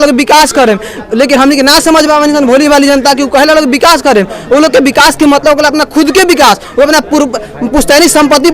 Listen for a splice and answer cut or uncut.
uncut